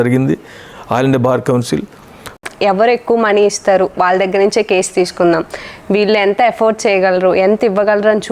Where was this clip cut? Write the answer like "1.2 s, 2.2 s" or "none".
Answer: 2.4 s